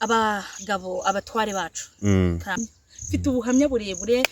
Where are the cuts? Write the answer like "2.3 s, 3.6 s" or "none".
2.5 s